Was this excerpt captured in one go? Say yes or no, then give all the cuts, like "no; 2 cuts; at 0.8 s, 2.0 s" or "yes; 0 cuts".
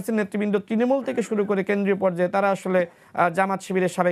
yes; 0 cuts